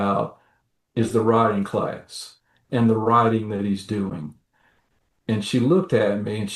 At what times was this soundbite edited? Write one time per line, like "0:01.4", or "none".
0:02.6